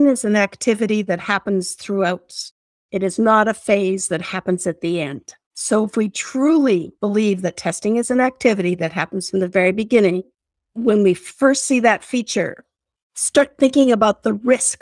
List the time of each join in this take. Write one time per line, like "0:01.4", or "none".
0:12.9